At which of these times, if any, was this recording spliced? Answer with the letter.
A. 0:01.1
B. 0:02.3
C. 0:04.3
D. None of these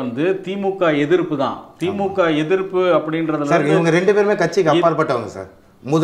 D